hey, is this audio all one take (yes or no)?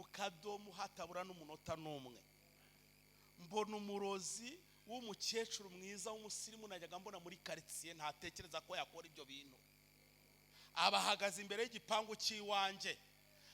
yes